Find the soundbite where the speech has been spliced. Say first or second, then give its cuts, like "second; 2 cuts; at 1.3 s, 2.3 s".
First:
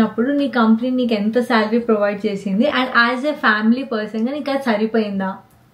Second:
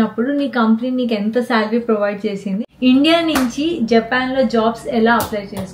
second; 1 cut; at 2.5 s